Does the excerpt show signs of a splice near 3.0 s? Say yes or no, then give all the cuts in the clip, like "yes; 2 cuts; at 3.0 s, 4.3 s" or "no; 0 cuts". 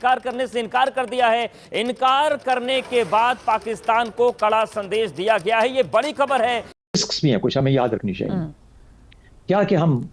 no; 1 cut; at 6.8 s